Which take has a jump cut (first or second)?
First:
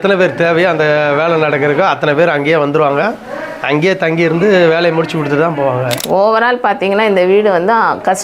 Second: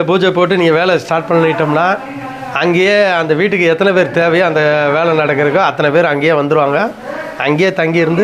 first